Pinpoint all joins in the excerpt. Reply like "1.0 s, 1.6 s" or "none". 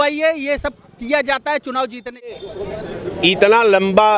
2.4 s